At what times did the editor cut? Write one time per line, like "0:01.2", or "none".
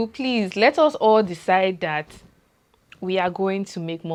none